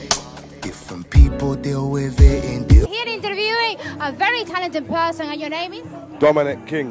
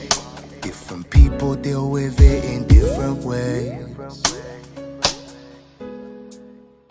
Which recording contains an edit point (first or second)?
second